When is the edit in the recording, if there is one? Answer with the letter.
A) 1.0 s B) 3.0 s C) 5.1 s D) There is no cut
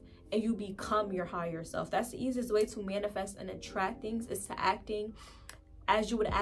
D